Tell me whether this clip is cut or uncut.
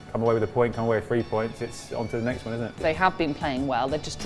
cut